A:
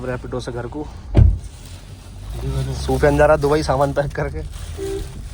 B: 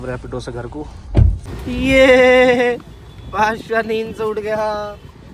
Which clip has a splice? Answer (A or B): B